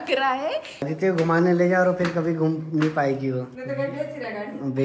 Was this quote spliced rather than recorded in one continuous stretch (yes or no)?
yes